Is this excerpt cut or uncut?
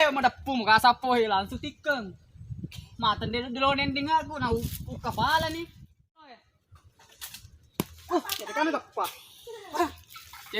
cut